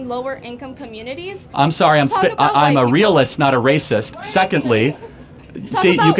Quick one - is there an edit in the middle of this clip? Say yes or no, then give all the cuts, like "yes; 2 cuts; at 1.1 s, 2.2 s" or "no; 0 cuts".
yes; 1 cut; at 1.4 s